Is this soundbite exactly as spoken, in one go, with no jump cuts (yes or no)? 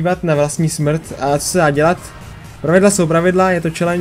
yes